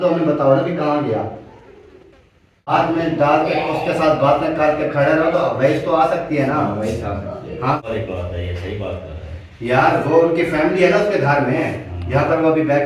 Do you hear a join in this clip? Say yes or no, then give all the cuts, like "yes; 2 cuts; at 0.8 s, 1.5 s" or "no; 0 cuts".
yes; 2 cuts; at 2.7 s, 7.8 s